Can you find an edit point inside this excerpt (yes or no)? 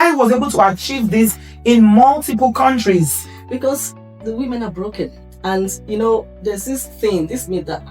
no